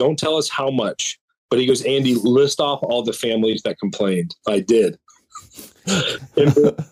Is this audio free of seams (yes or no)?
yes